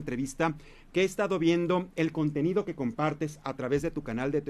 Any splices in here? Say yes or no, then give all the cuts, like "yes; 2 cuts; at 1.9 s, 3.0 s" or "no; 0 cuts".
no; 0 cuts